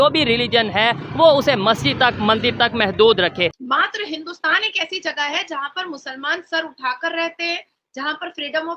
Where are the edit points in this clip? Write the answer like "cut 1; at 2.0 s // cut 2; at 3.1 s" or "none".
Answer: cut 1; at 3.6 s